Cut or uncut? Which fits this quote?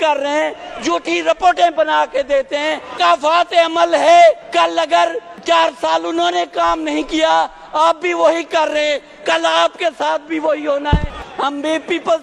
cut